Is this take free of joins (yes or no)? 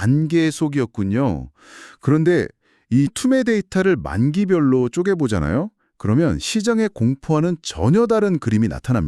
no